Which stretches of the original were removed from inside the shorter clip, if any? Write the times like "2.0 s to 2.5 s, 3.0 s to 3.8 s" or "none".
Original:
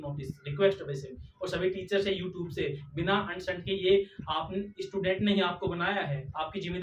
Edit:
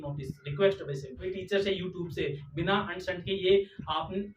1.3 s to 1.7 s